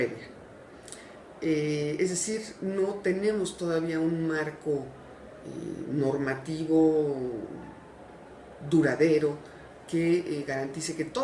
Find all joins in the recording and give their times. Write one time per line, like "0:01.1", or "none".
0:04.1